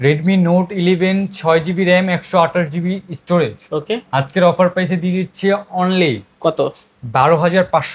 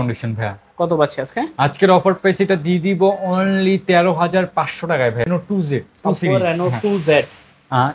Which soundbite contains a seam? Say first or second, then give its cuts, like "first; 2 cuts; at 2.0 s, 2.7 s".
second; 1 cut; at 5.3 s